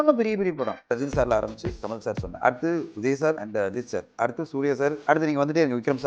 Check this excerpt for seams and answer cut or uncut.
cut